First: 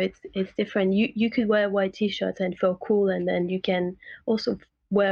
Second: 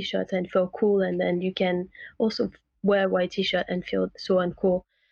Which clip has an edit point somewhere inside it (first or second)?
second